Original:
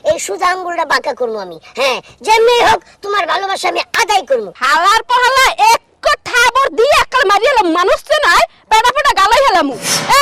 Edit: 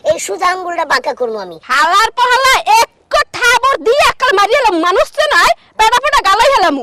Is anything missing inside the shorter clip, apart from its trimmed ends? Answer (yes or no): yes